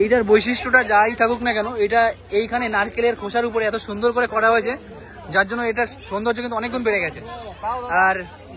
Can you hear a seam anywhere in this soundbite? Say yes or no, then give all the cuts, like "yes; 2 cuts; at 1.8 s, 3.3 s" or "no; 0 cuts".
no; 0 cuts